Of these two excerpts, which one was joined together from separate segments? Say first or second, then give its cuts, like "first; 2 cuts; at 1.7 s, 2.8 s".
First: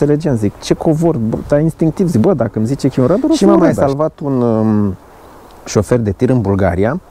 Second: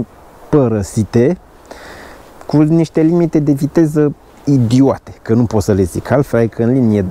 first; 1 cut; at 3.8 s